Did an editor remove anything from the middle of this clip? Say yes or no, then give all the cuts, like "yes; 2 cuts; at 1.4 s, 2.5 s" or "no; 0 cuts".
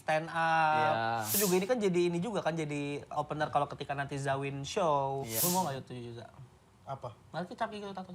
yes; 3 cuts; at 1.3 s, 3.1 s, 5.3 s